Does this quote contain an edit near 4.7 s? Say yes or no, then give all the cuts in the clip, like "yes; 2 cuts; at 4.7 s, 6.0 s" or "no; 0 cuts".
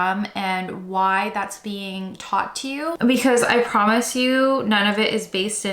no; 1 cut; at 3.0 s